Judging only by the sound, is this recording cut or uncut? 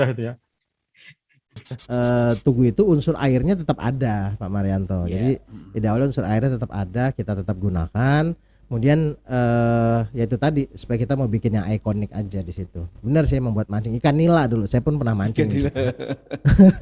cut